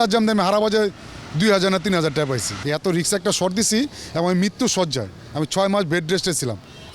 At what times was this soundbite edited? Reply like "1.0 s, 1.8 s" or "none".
2.5 s